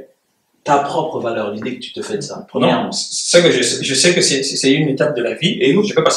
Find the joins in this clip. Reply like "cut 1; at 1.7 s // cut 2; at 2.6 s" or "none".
none

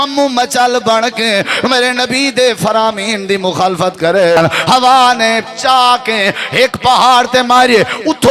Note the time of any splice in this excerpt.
cut 1; at 4.4 s

